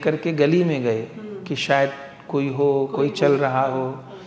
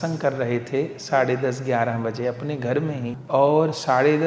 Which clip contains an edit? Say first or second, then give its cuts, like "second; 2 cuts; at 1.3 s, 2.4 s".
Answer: second; 1 cut; at 3.2 s